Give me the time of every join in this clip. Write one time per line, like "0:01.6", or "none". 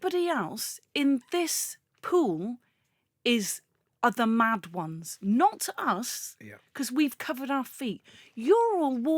none